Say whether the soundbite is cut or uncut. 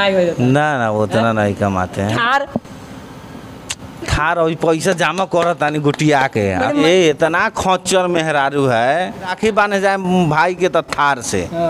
cut